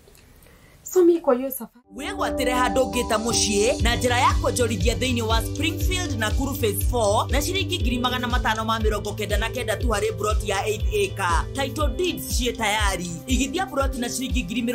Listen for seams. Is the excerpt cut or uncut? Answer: cut